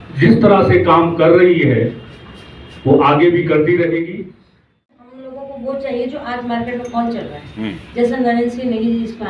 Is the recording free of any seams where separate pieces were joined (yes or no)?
no